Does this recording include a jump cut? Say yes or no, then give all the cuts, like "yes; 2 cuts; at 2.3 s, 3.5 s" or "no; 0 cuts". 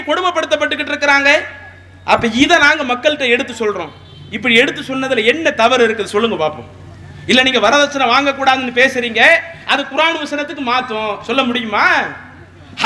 no; 0 cuts